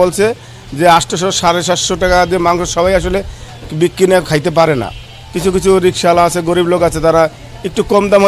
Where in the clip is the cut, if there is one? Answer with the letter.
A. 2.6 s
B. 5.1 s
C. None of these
C